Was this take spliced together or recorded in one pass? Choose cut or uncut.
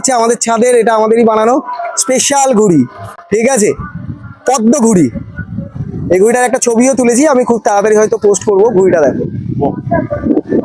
uncut